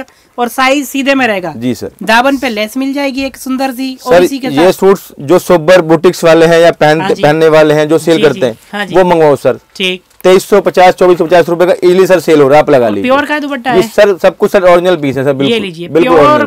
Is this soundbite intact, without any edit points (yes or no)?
yes